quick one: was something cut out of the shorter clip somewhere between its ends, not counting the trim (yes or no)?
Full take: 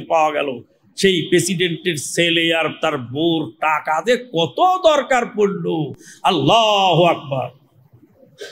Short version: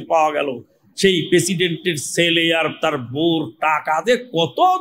no